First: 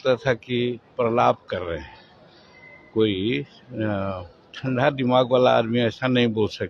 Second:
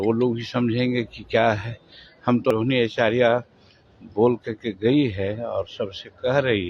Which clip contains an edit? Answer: second; 1 cut; at 2.5 s

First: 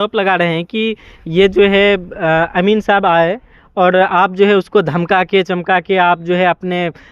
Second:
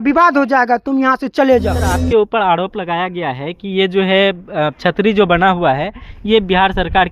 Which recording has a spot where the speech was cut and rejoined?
second; 1 cut; at 2.0 s

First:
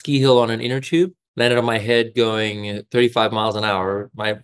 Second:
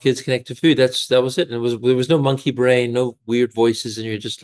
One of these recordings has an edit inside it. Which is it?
first; 1 cut; at 1.2 s

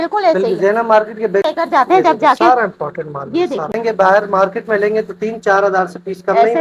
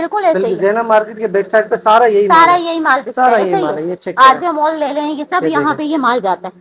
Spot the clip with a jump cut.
first; 2 cuts; at 1.5 s, 3.8 s

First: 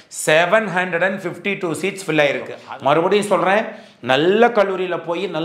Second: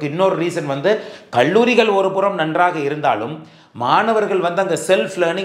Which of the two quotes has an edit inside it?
first; 1 cut; at 2.5 s

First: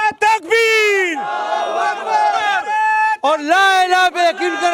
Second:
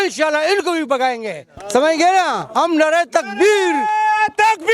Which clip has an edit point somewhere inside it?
second; 1 cut; at 1.6 s

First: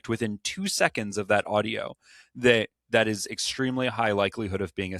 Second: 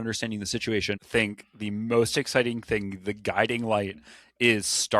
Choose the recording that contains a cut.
second; 1 cut; at 1.0 s

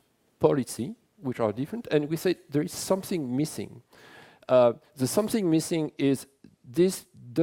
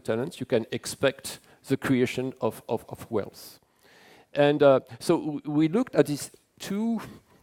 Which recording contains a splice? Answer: second; 1 cut; at 4.7 s

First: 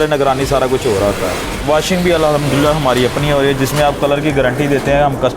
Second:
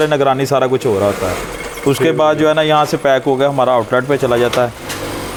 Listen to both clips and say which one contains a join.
first; 1 cut; at 1.6 s

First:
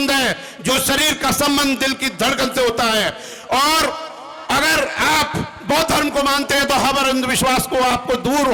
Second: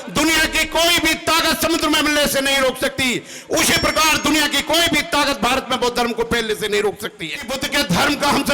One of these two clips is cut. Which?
second; 1 cut; at 7.6 s

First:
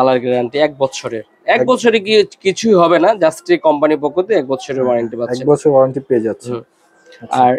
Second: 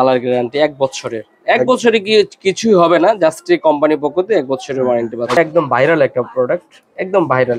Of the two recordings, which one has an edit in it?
second; 1 cut; at 5.4 s

